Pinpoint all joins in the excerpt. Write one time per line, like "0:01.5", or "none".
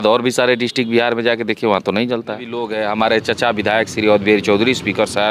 0:02.7